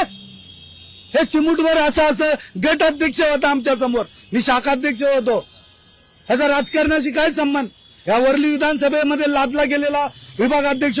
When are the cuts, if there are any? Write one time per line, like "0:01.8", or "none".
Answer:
none